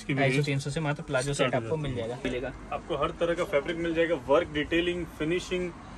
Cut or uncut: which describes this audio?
cut